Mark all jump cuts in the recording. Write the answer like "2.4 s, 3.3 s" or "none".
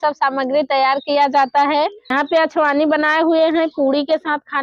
2.1 s